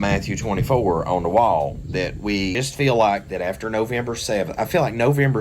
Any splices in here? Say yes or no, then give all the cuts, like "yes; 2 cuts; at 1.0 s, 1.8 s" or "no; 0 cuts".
yes; 1 cut; at 2.6 s